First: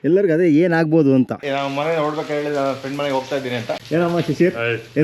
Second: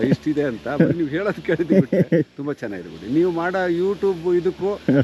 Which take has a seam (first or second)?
first